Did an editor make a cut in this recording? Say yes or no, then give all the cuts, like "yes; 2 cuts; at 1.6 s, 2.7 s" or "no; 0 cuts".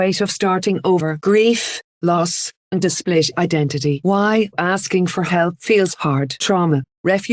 no; 0 cuts